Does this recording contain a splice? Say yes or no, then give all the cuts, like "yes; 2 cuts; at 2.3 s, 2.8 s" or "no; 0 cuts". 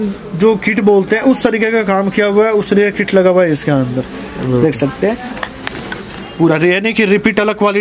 no; 0 cuts